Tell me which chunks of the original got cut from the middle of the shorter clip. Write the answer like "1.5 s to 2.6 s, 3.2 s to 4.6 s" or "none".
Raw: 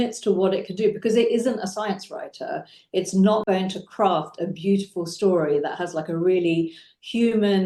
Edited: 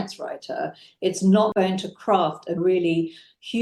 4.5 s to 6.2 s